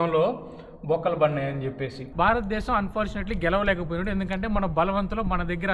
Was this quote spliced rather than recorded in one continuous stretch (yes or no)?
yes